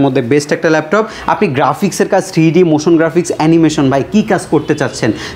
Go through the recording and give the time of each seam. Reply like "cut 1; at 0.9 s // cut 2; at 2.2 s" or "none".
cut 1; at 1.2 s